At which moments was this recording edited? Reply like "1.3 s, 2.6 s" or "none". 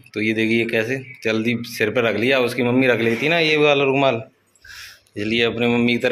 none